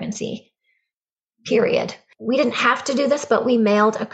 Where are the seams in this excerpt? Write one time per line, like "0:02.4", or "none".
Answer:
0:02.1